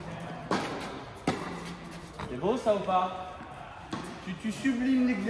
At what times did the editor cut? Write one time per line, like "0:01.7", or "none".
0:02.2